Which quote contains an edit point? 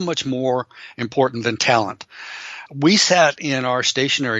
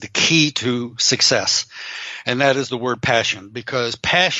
first; 1 cut; at 2.6 s

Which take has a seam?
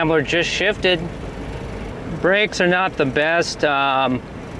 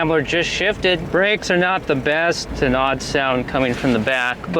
second; 2 cuts; at 1.1 s, 2.4 s

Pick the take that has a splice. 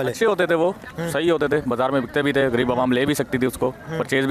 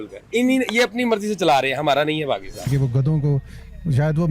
second; 1 cut; at 2.7 s

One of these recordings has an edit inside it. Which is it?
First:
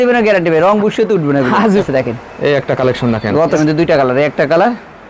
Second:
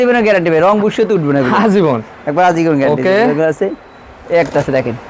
first; 2 cuts; at 1.8 s, 3.6 s

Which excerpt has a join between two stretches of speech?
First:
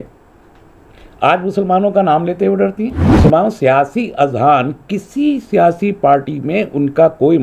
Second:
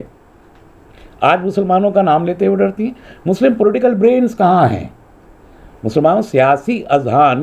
first; 1 cut; at 3.0 s

